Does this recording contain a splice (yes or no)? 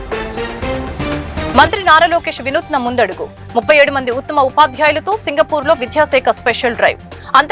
yes